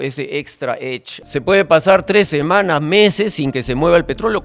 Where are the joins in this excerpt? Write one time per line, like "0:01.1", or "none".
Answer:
0:01.1